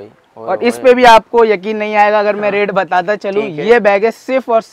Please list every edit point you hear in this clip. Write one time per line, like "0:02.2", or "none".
none